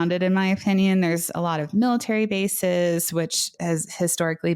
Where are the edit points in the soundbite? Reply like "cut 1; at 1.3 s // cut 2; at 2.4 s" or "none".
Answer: cut 1; at 3.6 s